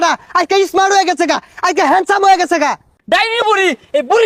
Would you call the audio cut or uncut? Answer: cut